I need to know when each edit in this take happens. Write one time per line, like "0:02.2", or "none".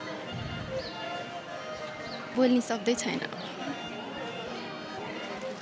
0:02.3